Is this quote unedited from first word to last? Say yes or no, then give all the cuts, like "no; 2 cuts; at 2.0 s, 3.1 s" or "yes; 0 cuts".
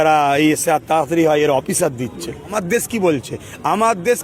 no; 1 cut; at 2.5 s